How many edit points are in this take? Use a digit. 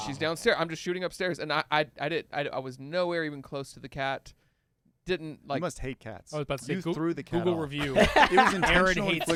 0